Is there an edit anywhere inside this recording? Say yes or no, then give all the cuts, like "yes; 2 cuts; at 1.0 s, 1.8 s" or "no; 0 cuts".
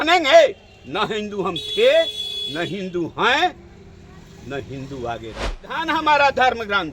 yes; 1 cut; at 5.8 s